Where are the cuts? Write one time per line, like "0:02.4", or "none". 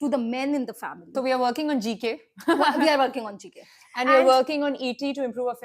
0:01.1